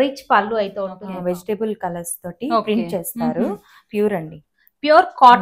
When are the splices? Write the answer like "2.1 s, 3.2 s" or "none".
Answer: 1.0 s